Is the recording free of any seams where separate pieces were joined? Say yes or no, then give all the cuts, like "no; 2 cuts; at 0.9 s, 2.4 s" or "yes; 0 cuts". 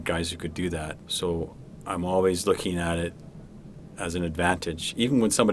no; 1 cut; at 1.0 s